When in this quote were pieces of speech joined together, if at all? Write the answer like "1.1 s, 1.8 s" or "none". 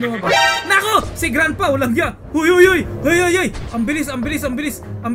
none